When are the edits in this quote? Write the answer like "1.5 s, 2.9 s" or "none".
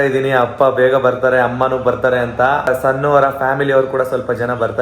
2.7 s